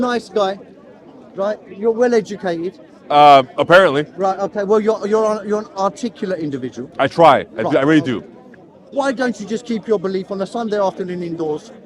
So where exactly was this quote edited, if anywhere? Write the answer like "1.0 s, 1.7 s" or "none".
none